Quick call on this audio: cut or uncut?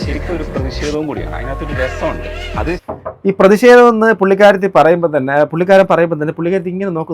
uncut